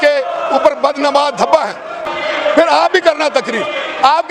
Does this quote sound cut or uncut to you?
cut